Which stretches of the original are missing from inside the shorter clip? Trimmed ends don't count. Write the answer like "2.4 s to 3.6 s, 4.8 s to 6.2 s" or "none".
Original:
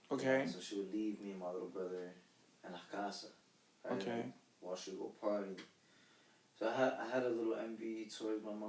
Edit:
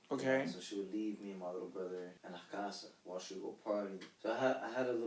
2.2 s to 2.6 s, 3.3 s to 4.5 s, 5.6 s to 6.4 s